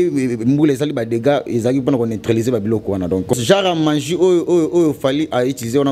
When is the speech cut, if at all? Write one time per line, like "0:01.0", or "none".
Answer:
0:03.4